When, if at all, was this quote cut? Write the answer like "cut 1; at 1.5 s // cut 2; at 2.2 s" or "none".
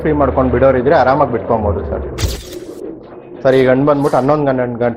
cut 1; at 2.5 s